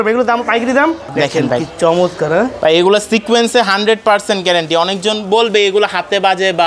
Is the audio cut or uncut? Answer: cut